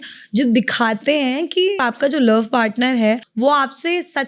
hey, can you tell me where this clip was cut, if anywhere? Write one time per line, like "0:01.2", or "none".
0:01.8
0:03.3